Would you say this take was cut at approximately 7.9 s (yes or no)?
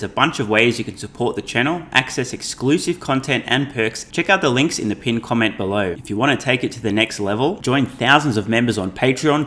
no